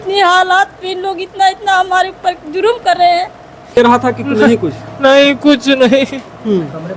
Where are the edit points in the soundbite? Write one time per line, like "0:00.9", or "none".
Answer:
0:03.8